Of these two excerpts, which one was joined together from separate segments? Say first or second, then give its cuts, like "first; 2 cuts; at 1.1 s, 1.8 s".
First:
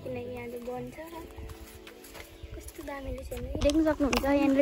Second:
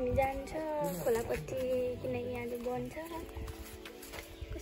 first; 1 cut; at 3.6 s